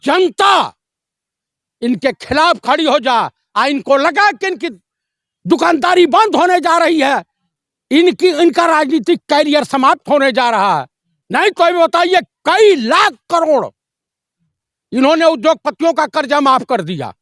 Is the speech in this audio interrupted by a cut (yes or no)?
no